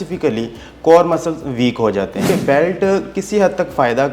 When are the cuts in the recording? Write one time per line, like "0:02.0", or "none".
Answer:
0:02.3